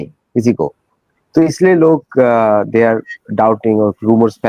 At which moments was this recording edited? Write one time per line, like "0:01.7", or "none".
none

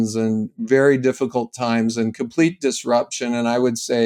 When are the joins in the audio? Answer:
none

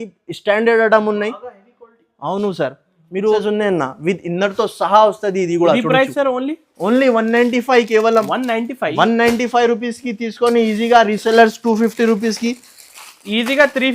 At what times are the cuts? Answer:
0:03.4

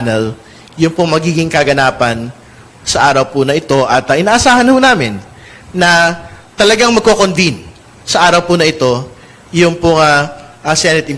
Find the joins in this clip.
none

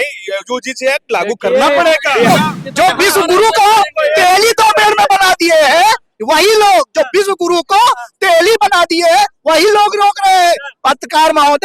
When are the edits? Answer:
0:02.3

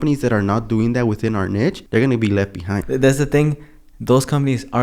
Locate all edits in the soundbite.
0:01.8
0:02.8

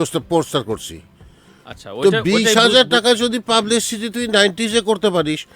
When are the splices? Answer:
none

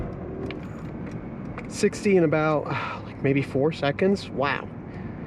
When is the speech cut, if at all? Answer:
none

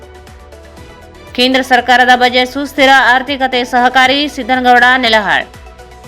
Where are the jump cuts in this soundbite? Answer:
0:01.0

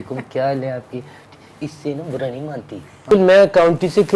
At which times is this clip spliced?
0:03.1

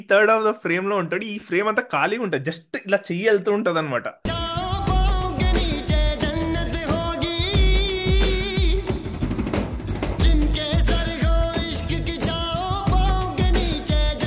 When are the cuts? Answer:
none

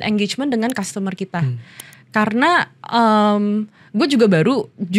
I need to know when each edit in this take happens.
none

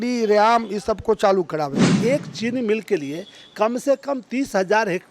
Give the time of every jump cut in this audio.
0:01.9

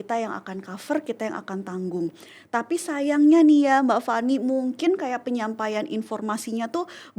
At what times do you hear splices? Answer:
none

